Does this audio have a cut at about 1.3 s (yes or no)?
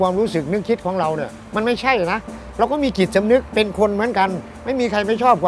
no